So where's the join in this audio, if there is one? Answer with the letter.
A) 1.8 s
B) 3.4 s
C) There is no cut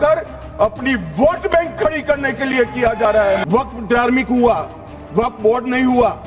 B